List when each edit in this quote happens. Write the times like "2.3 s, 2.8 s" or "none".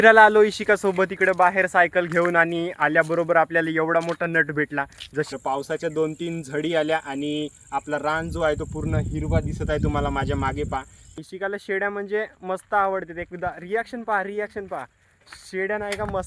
5.3 s, 11.0 s